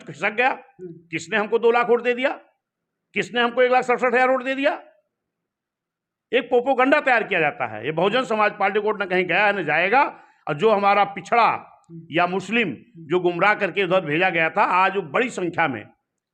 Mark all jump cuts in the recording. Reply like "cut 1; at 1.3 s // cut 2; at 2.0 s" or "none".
none